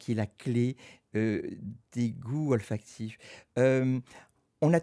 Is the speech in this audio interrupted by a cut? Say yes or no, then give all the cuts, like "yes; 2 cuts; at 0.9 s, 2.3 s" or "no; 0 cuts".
no; 0 cuts